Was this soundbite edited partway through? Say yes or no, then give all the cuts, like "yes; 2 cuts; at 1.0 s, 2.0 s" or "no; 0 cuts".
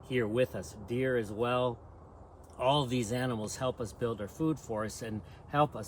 no; 0 cuts